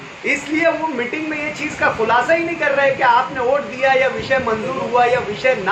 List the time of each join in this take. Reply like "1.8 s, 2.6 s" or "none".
none